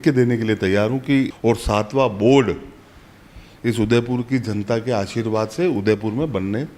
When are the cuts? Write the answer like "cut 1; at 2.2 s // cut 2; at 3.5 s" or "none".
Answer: cut 1; at 1.3 s